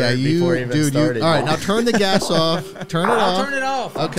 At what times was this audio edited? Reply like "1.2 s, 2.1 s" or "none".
none